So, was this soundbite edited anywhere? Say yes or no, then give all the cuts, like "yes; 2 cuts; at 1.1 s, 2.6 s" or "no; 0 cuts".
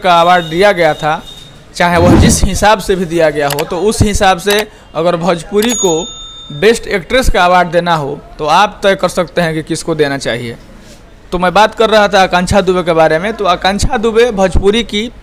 no; 0 cuts